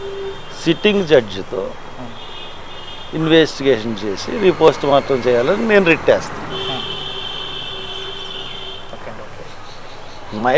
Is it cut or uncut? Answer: uncut